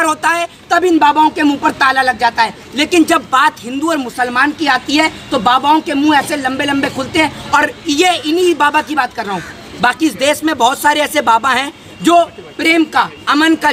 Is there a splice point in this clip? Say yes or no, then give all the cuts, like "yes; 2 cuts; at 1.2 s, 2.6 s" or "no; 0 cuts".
no; 0 cuts